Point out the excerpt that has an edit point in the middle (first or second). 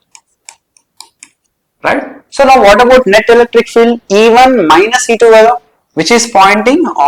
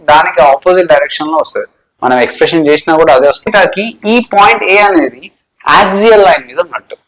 second